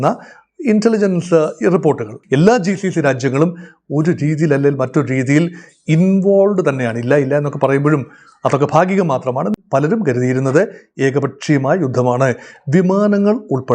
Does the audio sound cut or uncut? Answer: cut